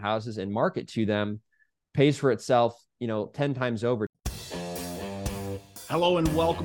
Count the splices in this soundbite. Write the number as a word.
one